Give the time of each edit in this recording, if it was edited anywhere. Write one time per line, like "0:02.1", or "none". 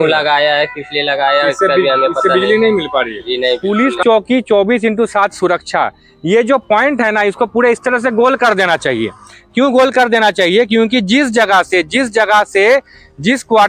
0:03.6